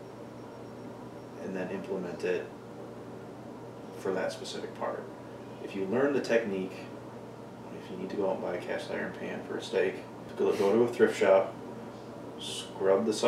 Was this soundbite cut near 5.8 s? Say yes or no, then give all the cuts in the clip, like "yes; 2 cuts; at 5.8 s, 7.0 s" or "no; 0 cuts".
no; 1 cut; at 10.3 s